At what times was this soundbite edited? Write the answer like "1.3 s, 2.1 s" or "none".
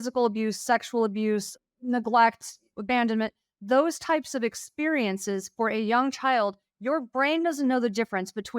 1.6 s, 2.7 s